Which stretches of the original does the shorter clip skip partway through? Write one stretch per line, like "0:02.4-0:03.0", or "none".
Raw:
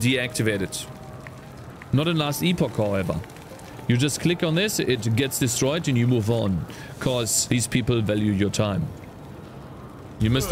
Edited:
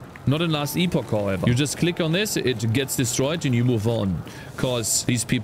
0:03.1-0:03.8